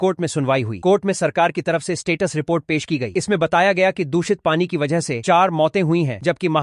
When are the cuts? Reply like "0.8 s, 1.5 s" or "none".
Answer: none